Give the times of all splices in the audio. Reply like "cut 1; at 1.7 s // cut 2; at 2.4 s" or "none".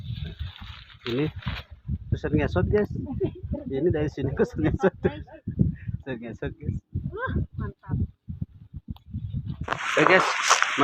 cut 1; at 9.7 s